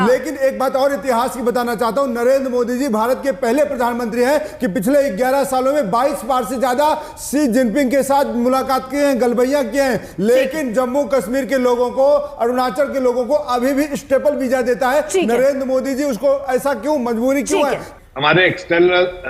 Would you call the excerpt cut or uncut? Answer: cut